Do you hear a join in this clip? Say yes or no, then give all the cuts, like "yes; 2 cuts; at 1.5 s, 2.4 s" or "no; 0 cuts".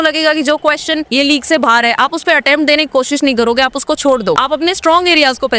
yes; 2 cuts; at 1.1 s, 4.4 s